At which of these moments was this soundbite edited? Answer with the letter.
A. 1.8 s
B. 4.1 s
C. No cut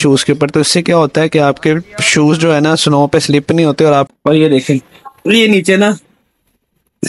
B